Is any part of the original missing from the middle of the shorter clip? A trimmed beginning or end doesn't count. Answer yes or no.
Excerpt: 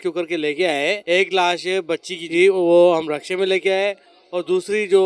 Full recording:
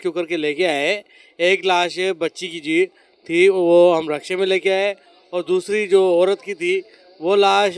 yes